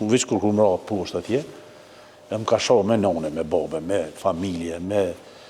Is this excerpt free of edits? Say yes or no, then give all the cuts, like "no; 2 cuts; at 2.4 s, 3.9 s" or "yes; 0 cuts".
yes; 0 cuts